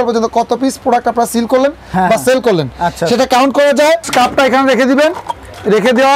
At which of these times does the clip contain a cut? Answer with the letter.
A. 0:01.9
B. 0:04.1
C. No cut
B